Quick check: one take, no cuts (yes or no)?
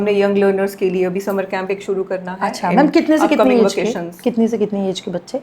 yes